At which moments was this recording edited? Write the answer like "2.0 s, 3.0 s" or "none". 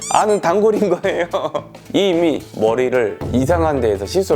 1.8 s